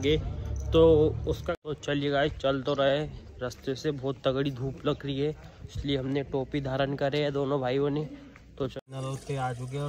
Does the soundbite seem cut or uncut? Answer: cut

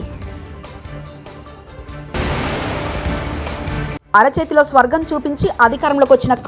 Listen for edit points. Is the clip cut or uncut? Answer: cut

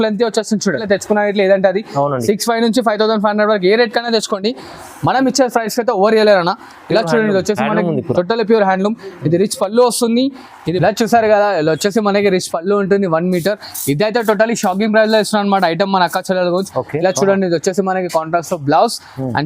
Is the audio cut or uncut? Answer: cut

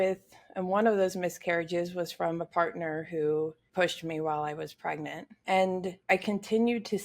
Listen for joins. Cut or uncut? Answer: cut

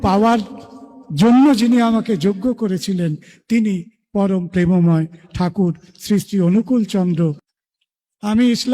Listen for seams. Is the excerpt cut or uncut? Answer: cut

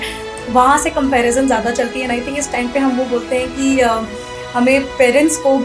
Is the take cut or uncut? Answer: uncut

